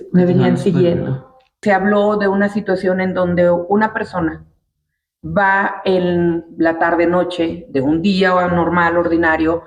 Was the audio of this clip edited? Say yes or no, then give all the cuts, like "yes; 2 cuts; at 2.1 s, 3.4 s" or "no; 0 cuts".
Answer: yes; 1 cut; at 1.6 s